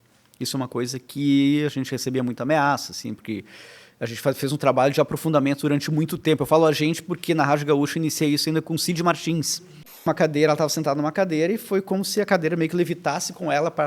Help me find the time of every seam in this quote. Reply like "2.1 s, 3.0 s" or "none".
10.0 s